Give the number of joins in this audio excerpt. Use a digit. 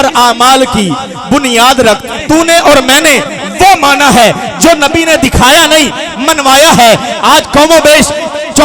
1